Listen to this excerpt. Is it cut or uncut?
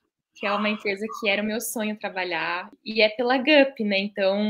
cut